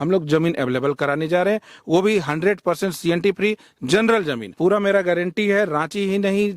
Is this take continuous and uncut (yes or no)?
no